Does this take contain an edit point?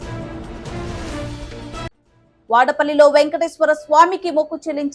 no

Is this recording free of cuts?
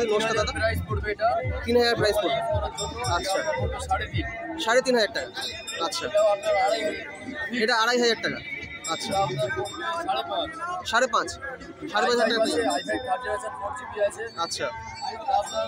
yes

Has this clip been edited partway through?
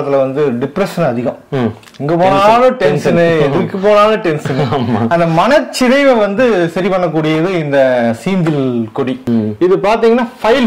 yes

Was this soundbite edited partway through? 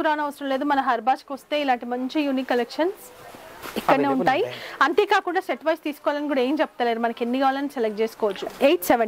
no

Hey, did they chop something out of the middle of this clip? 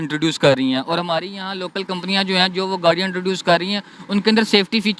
no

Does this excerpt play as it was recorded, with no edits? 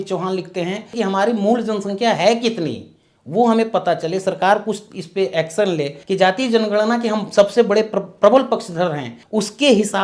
no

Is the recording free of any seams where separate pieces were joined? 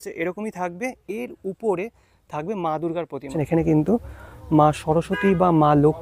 no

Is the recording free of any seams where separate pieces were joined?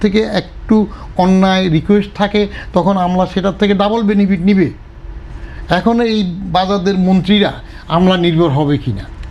yes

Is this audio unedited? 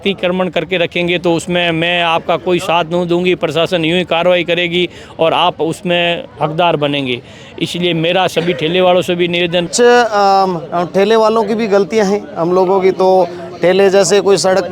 no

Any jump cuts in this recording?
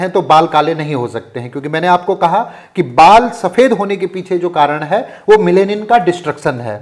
no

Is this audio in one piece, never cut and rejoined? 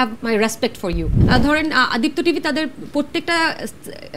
no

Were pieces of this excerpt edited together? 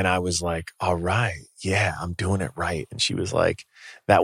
yes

